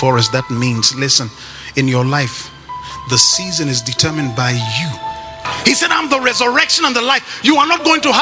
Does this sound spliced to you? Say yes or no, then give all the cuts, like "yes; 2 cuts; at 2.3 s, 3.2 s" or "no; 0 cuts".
yes; 1 cut; at 5.4 s